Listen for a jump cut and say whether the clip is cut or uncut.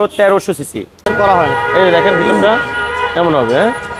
cut